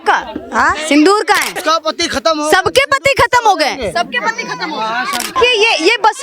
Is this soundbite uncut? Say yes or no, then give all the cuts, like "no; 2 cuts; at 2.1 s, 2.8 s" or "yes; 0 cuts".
no; 2 cuts; at 1.5 s, 5.3 s